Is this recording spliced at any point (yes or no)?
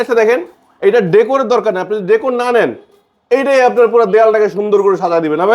no